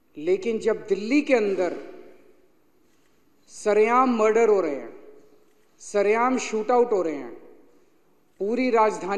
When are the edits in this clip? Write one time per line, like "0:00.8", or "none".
none